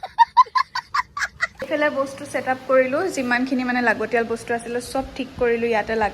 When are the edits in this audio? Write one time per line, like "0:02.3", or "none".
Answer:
0:01.4